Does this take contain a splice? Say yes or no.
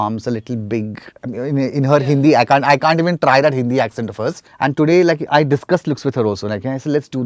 yes